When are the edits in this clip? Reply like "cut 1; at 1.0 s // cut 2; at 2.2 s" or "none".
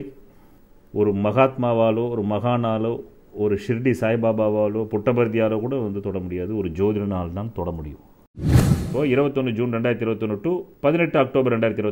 cut 1; at 8.6 s